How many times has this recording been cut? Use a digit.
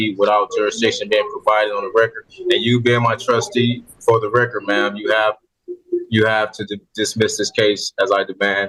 0